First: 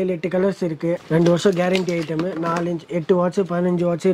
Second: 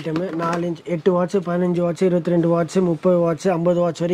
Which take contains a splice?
first; 1 cut; at 1.0 s

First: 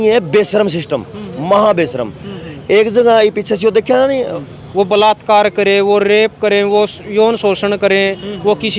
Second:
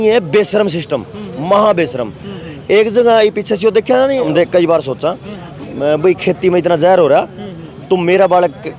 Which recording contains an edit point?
first; 1 cut; at 4.3 s

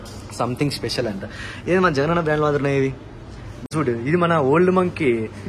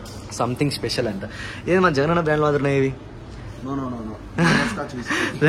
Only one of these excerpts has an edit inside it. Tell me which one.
first; 1 cut; at 3.7 s

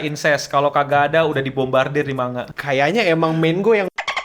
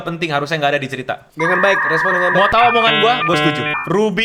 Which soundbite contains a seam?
first; 1 cut; at 2.5 s

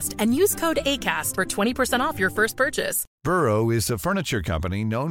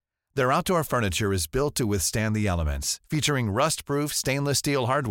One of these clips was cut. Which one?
first; 1 cut; at 3.0 s

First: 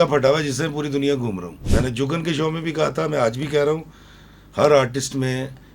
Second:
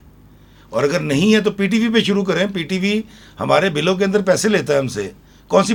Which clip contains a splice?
first; 1 cut; at 1.5 s

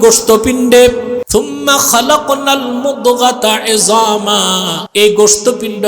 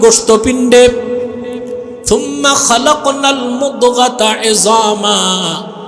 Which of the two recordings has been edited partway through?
first; 2 cuts; at 1.2 s, 4.8 s

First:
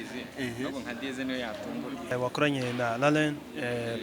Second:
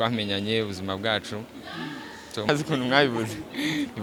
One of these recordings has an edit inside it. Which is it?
first; 1 cut; at 2.1 s

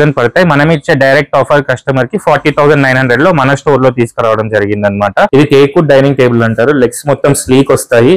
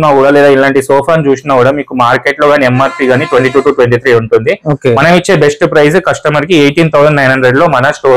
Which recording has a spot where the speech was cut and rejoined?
first; 1 cut; at 5.3 s

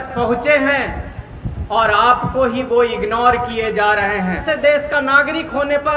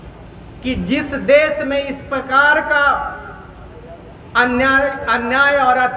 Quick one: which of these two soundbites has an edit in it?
first; 1 cut; at 4.4 s

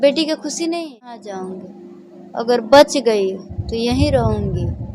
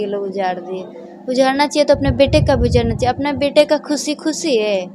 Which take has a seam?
first; 1 cut; at 1.2 s

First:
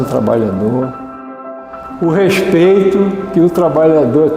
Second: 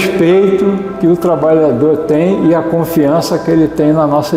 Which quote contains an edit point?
first; 1 cut; at 1.3 s

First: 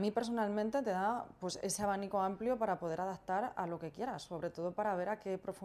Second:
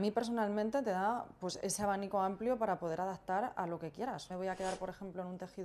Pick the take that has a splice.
second; 1 cut; at 4.3 s

